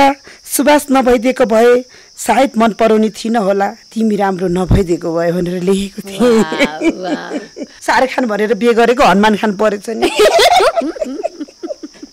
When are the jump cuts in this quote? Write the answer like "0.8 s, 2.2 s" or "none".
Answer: 7.7 s